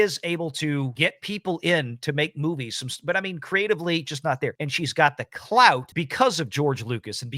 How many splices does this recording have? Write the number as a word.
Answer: three